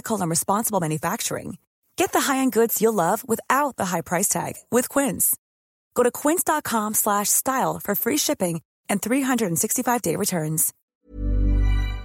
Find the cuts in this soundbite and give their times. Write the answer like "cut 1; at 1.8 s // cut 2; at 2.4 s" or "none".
cut 1; at 10.7 s